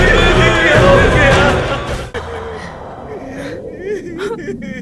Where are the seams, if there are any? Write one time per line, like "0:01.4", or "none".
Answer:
none